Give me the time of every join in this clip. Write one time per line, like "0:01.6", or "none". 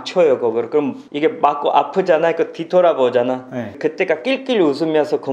none